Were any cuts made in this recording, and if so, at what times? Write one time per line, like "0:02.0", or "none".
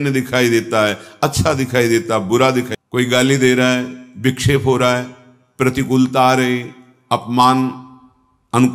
0:02.7